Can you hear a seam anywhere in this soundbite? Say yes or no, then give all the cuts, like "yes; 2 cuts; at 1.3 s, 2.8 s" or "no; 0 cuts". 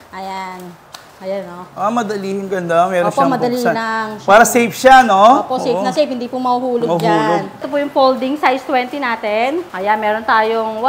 yes; 2 cuts; at 7.6 s, 9.7 s